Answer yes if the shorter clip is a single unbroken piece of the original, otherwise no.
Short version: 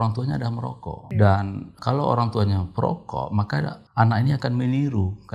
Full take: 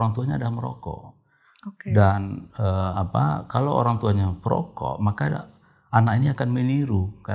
no